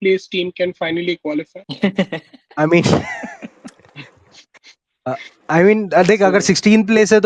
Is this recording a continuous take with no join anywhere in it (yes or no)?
no